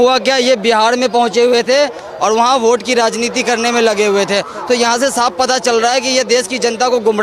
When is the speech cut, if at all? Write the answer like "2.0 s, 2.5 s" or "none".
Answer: none